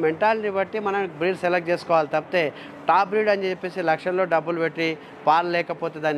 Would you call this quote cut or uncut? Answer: uncut